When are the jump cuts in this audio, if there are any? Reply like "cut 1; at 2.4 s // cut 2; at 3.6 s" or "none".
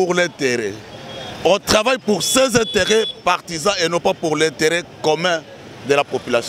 none